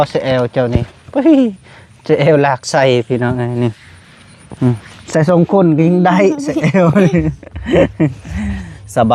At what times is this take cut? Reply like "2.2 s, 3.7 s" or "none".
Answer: none